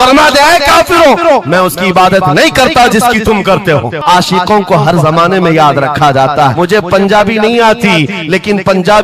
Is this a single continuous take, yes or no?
no